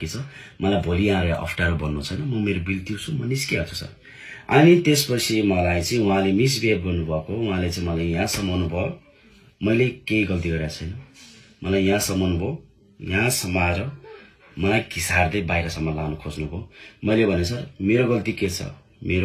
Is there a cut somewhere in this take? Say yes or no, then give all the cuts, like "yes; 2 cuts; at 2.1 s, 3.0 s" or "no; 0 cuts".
no; 0 cuts